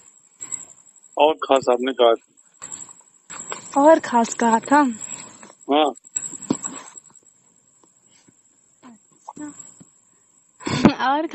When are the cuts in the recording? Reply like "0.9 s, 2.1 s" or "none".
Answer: 1.6 s